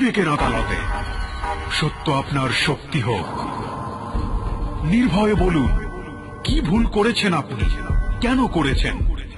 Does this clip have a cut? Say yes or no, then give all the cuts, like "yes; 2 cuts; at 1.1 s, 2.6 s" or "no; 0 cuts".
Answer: no; 0 cuts